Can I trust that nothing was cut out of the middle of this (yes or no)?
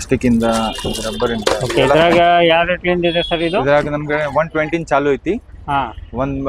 yes